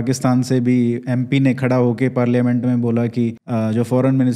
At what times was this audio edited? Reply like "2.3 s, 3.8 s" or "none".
3.4 s